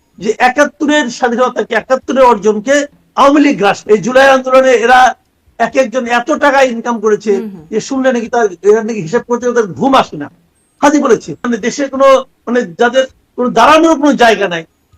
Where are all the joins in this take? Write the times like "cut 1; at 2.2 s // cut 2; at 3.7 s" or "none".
cut 1; at 3.8 s // cut 2; at 11.5 s